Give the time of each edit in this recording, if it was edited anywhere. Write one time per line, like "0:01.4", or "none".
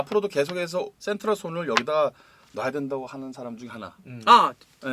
0:00.9